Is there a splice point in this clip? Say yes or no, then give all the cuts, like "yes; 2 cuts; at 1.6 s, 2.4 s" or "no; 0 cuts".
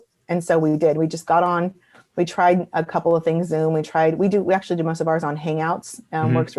no; 0 cuts